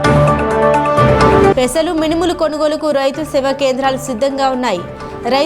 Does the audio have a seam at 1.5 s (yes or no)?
yes